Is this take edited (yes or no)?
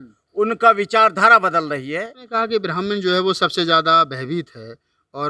yes